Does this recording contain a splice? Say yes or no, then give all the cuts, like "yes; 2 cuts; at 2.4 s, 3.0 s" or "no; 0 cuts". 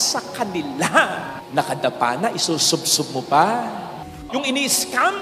yes; 1 cut; at 4.1 s